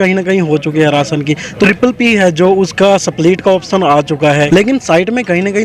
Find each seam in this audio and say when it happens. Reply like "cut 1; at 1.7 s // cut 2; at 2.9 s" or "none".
cut 1; at 1.7 s // cut 2; at 4.5 s